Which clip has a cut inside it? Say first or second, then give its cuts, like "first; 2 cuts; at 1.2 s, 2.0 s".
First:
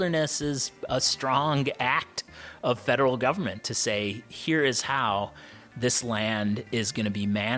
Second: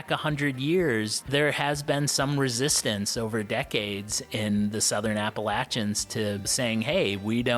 second; 1 cut; at 1.2 s